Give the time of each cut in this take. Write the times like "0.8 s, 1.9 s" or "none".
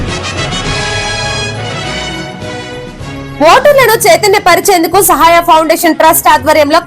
none